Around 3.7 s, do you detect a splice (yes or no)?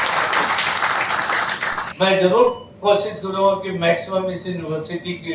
no